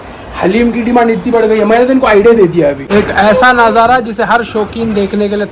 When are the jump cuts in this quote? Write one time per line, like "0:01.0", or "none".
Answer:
0:03.0